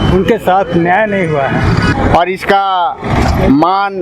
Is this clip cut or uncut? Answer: cut